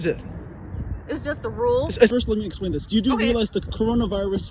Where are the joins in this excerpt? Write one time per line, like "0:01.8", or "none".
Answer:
0:02.1